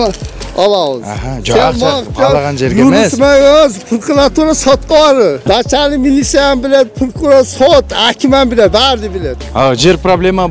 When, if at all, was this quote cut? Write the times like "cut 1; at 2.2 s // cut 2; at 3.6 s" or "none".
cut 1; at 5.4 s // cut 2; at 9.4 s